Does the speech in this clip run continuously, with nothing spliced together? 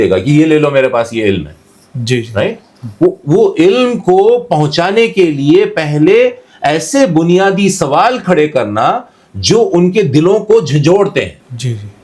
yes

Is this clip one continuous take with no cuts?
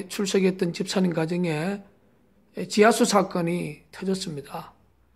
no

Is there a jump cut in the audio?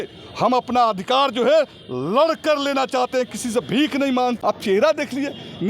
yes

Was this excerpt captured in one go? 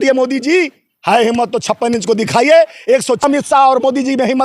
no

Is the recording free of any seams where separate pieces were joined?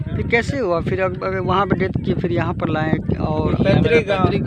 yes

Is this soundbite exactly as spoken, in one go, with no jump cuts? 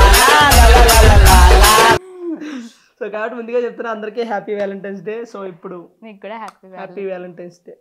yes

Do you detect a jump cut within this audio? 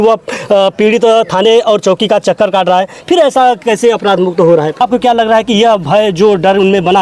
yes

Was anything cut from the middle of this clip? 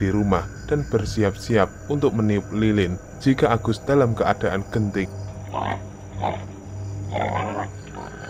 no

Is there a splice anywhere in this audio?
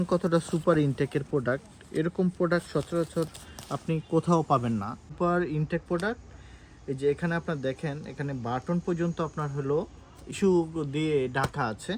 yes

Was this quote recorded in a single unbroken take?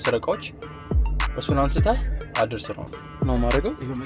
no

